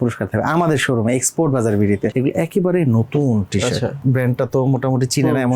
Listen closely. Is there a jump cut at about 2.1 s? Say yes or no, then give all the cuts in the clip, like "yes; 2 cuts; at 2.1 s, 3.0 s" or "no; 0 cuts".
yes; 2 cuts; at 2.1 s, 4.0 s